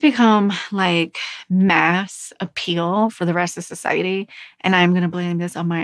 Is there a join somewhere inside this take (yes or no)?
no